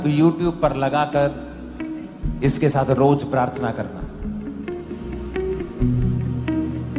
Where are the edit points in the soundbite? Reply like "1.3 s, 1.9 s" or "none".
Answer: none

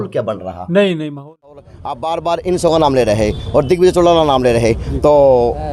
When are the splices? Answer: 1.6 s

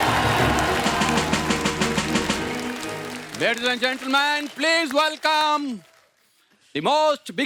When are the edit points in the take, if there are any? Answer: none

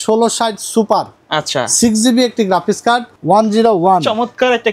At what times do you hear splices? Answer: 3.1 s

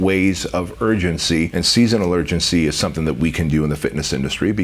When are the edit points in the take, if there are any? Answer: 1.5 s

